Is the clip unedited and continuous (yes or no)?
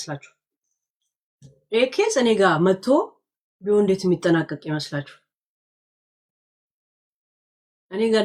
yes